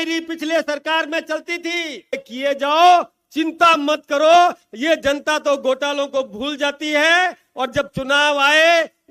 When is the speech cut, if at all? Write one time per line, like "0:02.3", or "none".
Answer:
0:02.1